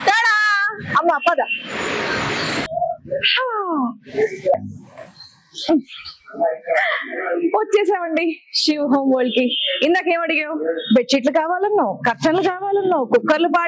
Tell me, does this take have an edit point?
no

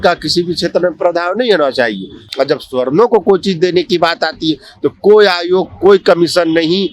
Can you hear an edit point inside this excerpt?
yes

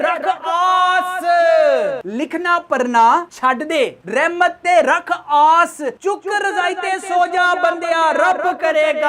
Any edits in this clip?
no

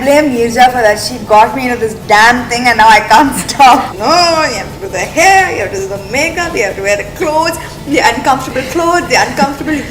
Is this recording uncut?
no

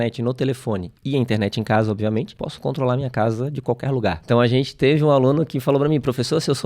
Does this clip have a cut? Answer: yes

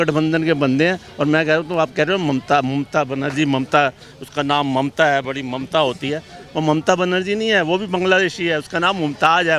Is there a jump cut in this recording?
no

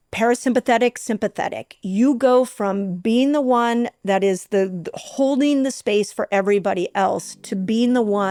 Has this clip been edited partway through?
no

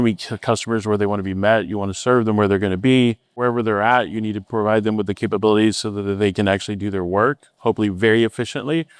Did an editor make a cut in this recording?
yes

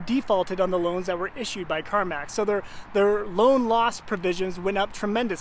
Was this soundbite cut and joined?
no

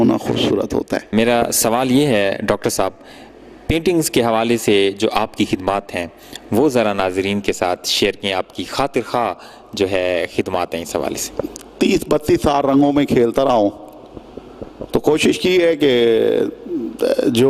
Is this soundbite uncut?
yes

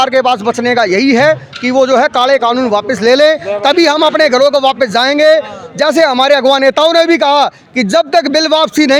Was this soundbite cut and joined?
no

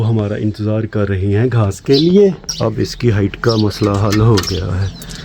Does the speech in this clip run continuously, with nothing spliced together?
no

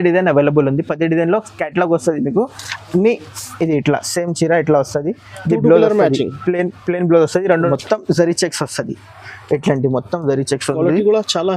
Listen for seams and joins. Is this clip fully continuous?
no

